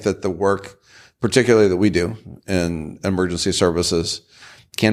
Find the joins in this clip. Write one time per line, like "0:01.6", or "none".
none